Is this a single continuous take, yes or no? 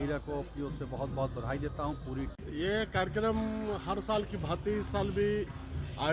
no